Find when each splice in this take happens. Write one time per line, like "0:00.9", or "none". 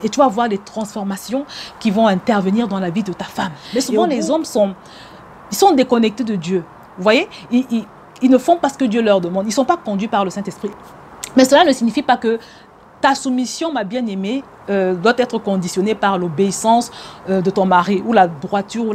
0:03.6
0:10.7